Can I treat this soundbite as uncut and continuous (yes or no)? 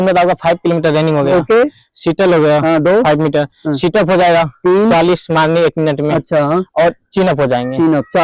yes